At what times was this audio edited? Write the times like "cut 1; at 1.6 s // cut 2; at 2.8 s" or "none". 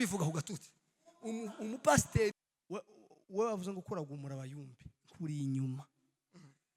cut 1; at 2.3 s